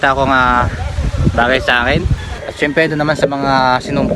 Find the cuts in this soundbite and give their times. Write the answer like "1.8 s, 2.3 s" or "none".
2.3 s